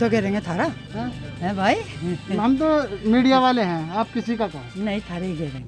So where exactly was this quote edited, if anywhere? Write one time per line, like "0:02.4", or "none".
none